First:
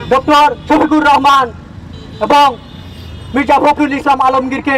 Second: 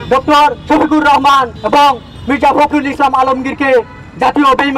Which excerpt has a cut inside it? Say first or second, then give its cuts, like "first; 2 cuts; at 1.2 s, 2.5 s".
second; 2 cuts; at 1.6 s, 2.1 s